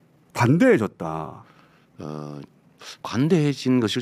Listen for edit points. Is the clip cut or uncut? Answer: uncut